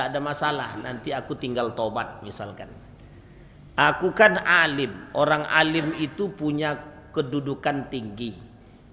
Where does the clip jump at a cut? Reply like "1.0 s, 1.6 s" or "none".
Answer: none

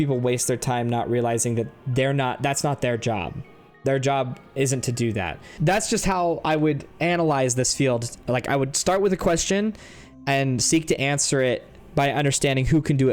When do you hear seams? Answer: 5.4 s

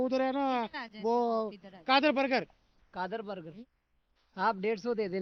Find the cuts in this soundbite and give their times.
3.5 s

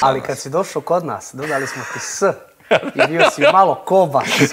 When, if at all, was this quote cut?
none

